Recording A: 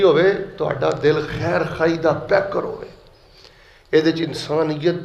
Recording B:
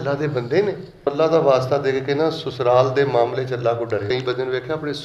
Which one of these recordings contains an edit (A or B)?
B